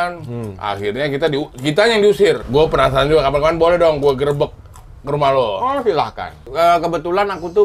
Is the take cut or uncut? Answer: cut